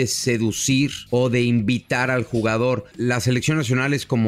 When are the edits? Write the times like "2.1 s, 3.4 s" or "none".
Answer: 1.0 s, 2.9 s